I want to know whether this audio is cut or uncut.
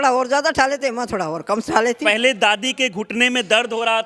cut